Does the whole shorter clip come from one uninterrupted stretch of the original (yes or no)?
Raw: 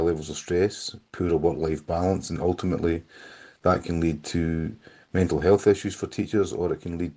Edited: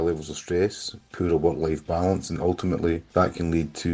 no